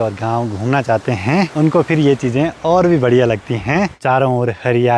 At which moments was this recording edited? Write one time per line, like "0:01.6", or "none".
0:01.5
0:04.0